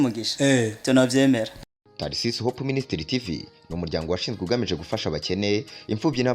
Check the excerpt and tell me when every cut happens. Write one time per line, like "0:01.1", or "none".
0:01.7

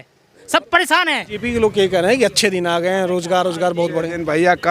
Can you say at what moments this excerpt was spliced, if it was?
0:01.3

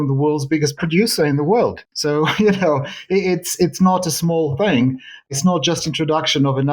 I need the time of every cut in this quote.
0:05.3

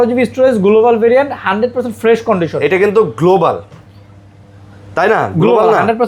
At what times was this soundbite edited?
none

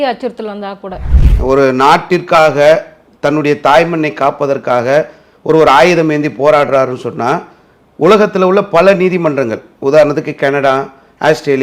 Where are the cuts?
0:01.1

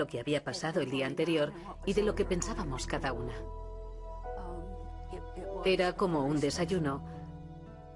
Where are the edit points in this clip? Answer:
none

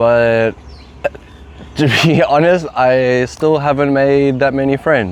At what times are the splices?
none

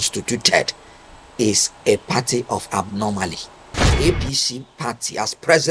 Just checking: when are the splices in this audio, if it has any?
0:03.9

